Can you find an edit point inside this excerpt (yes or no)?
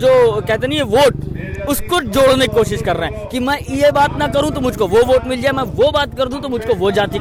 no